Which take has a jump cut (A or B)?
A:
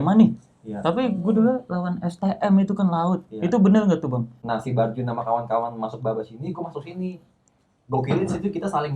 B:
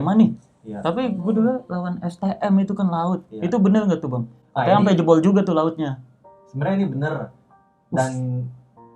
A